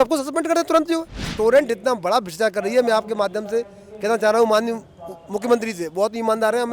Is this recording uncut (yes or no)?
no